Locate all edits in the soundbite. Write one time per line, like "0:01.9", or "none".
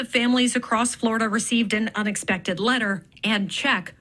none